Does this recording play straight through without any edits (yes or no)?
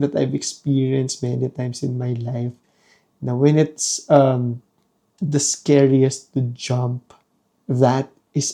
yes